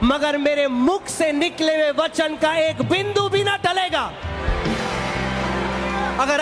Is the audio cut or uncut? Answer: uncut